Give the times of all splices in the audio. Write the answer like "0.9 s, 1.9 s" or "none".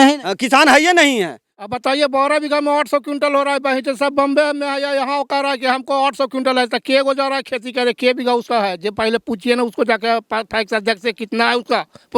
1.7 s